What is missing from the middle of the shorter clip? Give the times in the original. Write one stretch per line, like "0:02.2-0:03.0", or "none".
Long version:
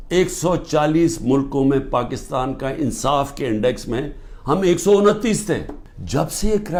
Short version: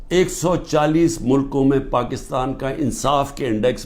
none